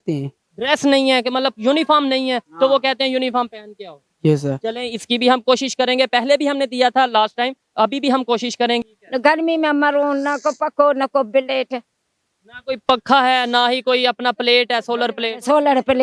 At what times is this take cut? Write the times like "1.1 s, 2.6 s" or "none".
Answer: 8.8 s